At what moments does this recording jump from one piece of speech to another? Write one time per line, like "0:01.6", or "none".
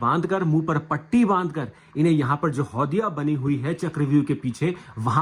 none